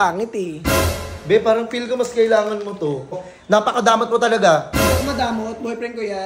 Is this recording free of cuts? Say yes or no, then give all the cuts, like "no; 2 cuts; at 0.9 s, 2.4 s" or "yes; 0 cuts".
no; 1 cut; at 3.3 s